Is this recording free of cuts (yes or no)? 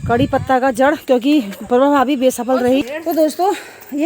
no